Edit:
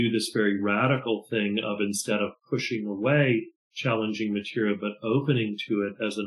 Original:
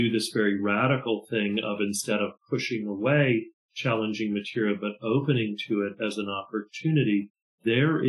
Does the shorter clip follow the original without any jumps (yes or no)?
yes